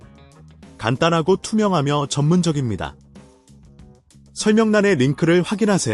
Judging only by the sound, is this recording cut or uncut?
cut